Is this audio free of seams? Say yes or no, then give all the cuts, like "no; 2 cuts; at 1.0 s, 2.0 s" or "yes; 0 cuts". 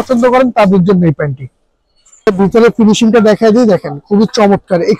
no; 1 cut; at 2.3 s